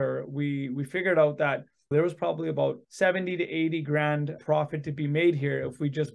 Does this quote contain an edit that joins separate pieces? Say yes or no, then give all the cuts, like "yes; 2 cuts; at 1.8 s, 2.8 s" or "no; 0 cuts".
yes; 2 cuts; at 1.9 s, 2.9 s